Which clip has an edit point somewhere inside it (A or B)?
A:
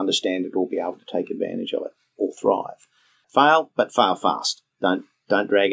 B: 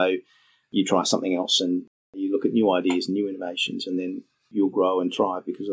A